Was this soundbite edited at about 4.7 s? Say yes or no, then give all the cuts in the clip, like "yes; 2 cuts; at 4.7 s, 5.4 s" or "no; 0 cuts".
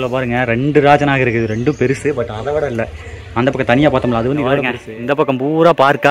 yes; 1 cut; at 4.7 s